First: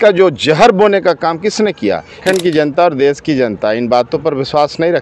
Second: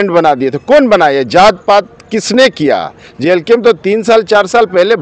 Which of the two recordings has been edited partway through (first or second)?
first